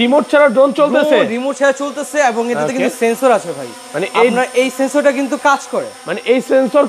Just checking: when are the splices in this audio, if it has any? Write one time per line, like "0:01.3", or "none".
none